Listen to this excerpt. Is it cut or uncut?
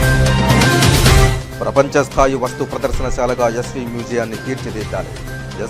uncut